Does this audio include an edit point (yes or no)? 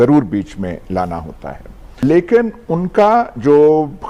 yes